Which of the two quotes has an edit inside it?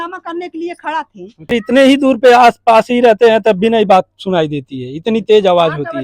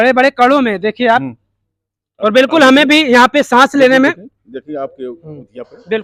first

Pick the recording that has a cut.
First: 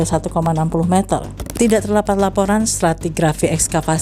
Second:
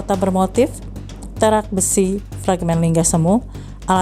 first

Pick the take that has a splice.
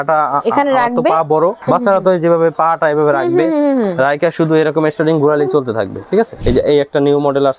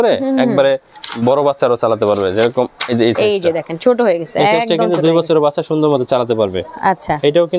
first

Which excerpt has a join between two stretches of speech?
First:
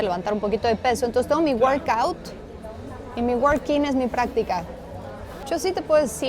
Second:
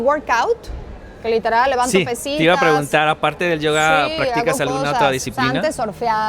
first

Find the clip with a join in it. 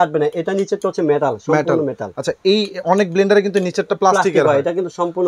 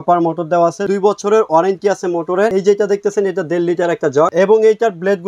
second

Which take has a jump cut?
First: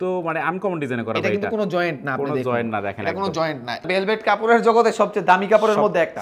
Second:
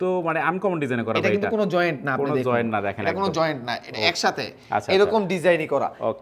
first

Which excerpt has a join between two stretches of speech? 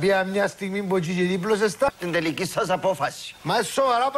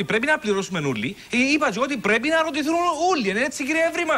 first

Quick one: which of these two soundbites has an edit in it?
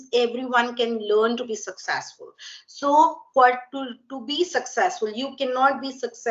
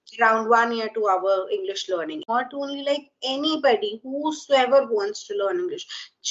second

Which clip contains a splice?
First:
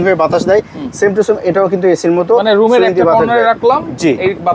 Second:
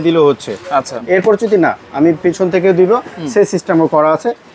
second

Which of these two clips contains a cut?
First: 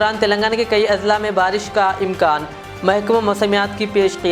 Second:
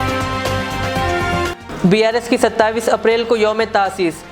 second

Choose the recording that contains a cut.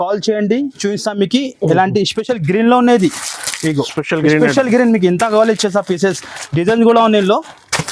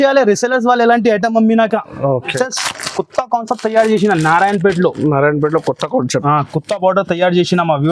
second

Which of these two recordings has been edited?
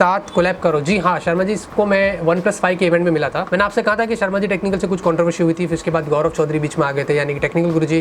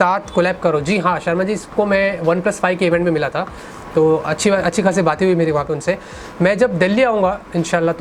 first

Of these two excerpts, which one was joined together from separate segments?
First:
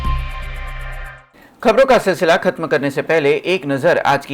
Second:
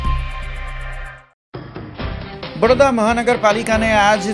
second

